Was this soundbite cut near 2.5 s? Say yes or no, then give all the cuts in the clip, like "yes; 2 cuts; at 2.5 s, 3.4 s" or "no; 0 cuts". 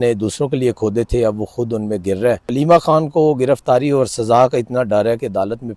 yes; 1 cut; at 2.5 s